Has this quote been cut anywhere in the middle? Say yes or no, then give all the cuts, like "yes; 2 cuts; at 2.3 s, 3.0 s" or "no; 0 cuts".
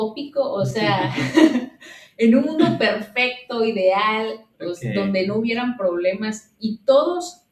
no; 0 cuts